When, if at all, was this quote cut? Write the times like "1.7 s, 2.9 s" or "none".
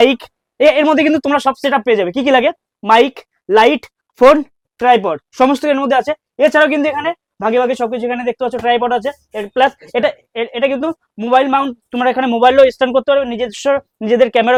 none